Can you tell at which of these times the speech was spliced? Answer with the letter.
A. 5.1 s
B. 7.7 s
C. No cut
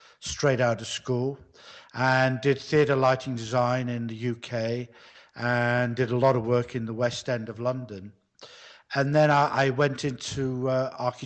C